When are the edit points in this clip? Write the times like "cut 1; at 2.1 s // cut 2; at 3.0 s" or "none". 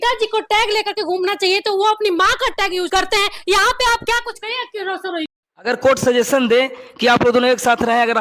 cut 1; at 5.3 s